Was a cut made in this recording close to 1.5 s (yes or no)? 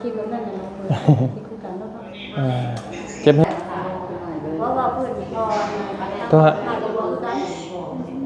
no